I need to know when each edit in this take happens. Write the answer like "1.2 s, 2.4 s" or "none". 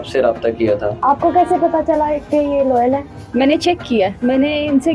0.9 s, 4.2 s